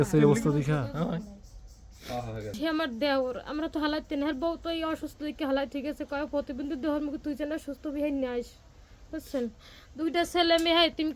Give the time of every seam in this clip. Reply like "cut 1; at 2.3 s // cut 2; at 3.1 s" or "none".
cut 1; at 2.4 s